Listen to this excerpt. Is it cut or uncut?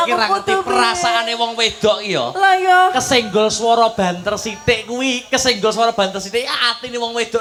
uncut